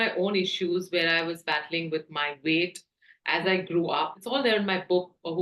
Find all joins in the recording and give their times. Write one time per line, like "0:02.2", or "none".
0:04.2